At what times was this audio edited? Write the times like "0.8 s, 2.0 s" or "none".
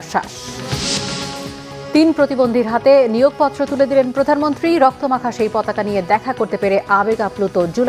none